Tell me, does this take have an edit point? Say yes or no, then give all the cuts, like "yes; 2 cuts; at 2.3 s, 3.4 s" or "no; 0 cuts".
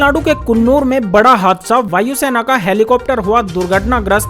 no; 0 cuts